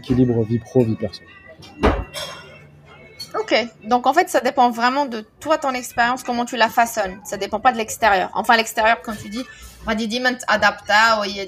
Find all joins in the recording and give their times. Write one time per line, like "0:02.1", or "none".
none